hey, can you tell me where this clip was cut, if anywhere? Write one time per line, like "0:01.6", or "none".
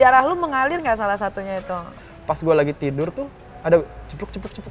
0:02.0